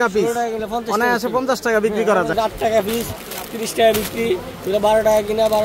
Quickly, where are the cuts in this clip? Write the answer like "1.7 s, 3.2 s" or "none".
2.3 s